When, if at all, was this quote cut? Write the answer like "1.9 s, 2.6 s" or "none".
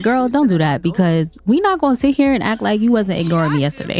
none